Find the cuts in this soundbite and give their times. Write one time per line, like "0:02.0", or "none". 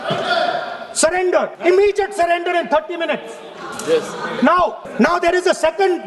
0:01.5
0:04.8